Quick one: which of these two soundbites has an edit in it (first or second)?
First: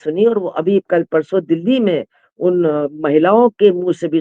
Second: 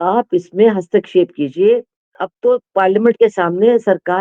second